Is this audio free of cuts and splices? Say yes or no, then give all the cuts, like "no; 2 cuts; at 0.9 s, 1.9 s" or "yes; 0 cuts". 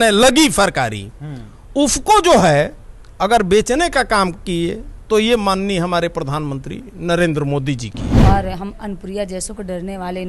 no; 1 cut; at 8.0 s